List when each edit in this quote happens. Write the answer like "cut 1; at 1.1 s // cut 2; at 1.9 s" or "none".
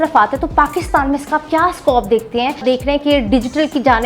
cut 1; at 2.6 s